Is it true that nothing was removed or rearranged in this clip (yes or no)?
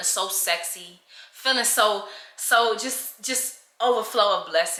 yes